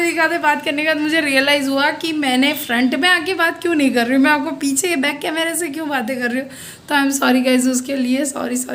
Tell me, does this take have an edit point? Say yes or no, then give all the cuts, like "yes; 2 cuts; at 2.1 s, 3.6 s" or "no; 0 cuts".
no; 0 cuts